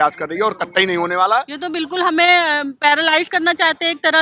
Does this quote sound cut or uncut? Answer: cut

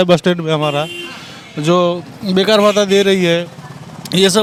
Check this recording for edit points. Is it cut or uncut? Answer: uncut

